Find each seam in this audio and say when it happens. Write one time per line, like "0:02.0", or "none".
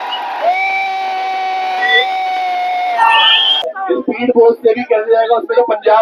0:03.7